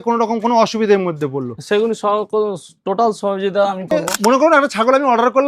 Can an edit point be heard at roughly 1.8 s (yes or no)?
no